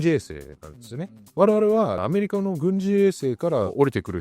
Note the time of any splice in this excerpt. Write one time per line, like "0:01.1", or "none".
0:01.2
0:02.0